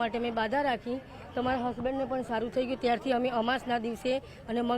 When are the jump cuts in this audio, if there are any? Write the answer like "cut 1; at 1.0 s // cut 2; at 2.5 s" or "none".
none